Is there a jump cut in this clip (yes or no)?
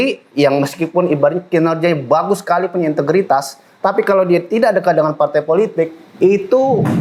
no